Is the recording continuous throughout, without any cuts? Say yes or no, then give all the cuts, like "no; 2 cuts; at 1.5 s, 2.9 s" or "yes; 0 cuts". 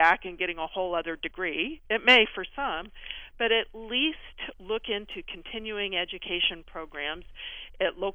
yes; 0 cuts